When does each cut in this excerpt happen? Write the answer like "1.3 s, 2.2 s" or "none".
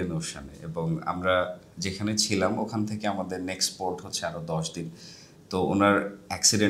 none

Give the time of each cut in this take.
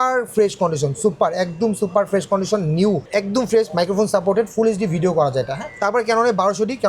3.0 s, 5.6 s

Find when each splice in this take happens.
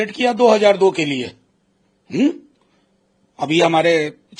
none

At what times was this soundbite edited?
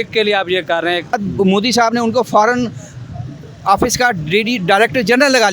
1.2 s

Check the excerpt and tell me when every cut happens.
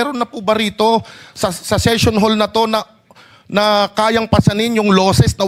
none

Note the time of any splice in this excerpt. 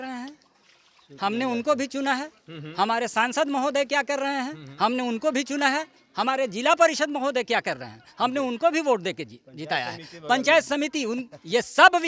none

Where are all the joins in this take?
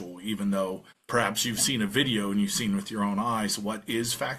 0.9 s

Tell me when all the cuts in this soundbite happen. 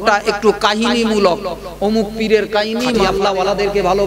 3.0 s

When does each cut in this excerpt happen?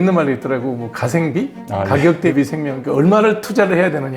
1.6 s

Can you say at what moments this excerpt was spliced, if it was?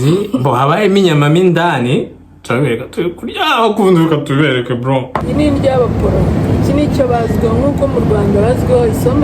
5.2 s

